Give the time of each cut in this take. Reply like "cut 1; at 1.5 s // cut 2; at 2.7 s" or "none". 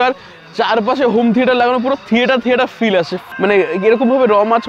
cut 1; at 3.3 s